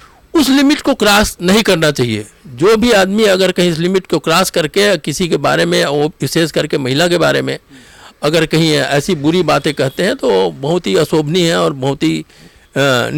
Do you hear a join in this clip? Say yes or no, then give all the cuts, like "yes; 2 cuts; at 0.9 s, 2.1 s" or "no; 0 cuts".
no; 0 cuts